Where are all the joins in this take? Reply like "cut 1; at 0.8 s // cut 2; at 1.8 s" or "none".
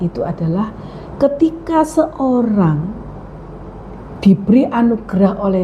none